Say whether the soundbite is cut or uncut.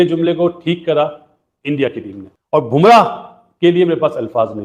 uncut